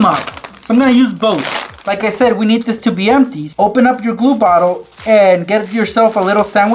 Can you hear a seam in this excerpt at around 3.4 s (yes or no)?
yes